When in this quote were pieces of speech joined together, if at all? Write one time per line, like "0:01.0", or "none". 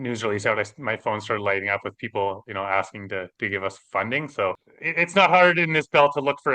0:04.7

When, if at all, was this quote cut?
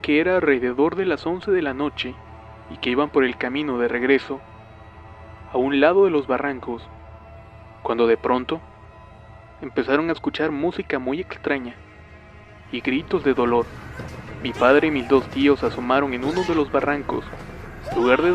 0:13.3

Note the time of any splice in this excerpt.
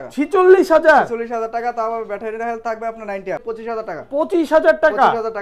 0:03.4

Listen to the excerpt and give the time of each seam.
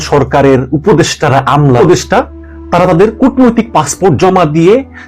0:01.8

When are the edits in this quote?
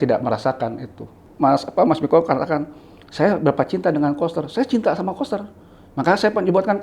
0:01.2

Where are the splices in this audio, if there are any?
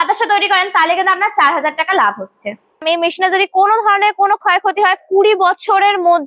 0:02.8

